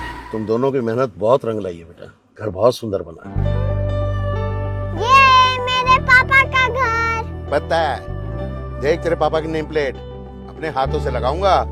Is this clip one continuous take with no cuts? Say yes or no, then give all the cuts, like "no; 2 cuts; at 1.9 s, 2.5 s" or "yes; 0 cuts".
yes; 0 cuts